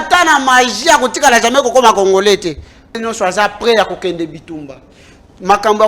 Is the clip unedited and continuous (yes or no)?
no